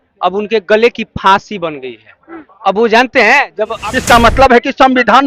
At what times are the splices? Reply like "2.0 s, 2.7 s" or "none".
3.8 s

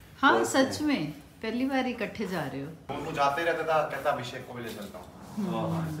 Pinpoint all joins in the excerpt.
2.8 s

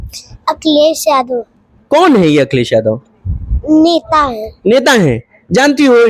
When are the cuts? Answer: none

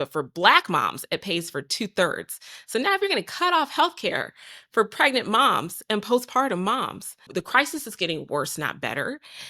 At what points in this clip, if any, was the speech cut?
7.3 s

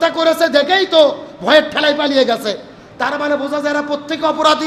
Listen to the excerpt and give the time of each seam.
none

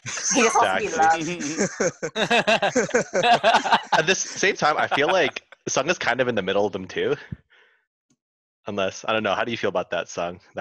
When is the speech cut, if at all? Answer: none

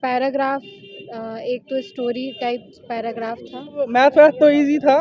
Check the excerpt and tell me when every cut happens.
3.9 s

